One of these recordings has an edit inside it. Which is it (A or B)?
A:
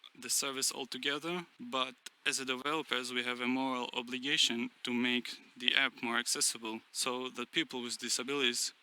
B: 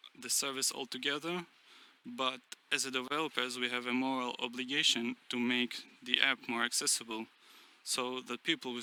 A